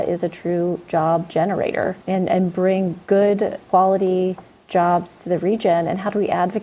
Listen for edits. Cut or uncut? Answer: cut